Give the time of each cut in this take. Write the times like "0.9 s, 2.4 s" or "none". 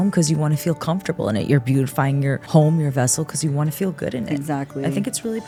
none